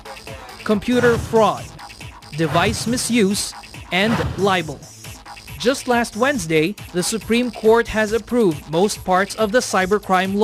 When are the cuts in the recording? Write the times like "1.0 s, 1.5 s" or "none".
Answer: none